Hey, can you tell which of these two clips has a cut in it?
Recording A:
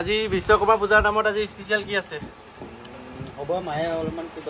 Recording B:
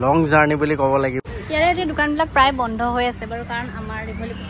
B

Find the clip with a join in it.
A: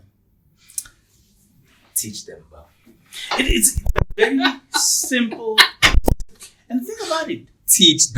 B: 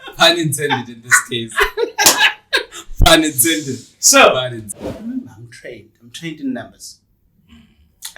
B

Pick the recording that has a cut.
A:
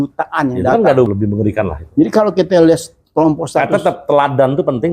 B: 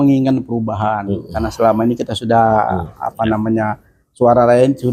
A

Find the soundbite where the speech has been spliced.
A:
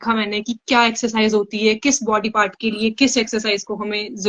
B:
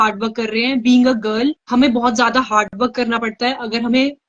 B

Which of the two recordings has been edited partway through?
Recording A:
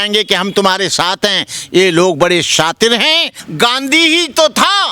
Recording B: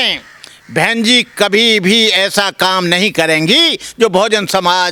A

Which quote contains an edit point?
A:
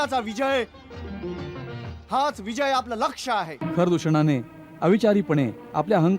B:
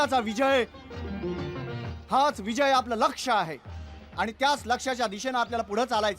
A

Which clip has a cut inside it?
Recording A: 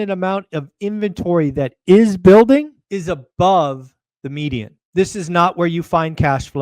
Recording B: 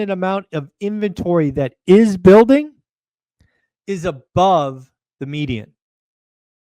A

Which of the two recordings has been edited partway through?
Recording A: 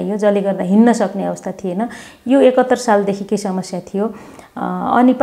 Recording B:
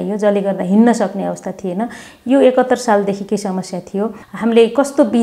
B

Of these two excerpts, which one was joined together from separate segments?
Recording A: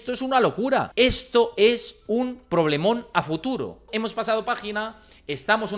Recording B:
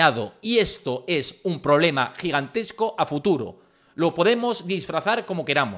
A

